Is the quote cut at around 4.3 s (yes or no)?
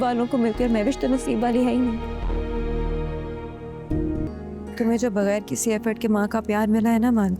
yes